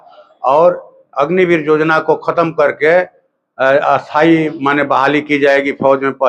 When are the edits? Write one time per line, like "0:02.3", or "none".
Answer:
none

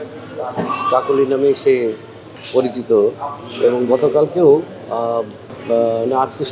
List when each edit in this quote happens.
none

